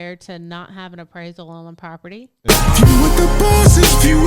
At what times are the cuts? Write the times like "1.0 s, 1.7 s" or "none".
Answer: 2.4 s